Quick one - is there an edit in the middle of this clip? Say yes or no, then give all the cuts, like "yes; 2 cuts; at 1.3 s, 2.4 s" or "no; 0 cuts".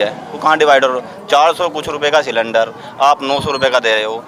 no; 0 cuts